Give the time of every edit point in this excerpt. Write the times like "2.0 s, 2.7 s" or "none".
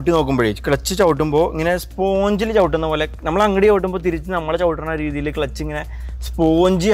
none